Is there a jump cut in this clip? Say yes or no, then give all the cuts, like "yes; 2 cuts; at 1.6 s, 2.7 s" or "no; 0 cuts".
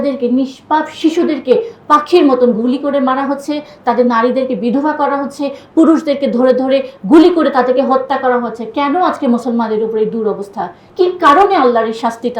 yes; 1 cut; at 10.9 s